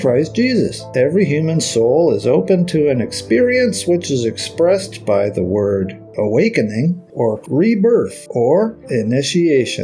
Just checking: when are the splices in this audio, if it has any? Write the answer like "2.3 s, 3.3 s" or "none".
0.9 s, 6.1 s, 7.4 s, 8.2 s, 8.8 s